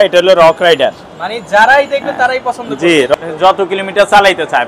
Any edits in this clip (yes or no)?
yes